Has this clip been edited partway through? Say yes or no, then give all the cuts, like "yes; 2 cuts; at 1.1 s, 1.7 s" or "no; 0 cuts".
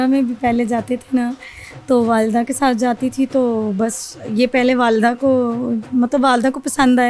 no; 0 cuts